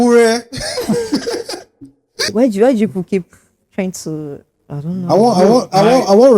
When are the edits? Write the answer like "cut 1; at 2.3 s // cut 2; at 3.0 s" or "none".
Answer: cut 1; at 2.3 s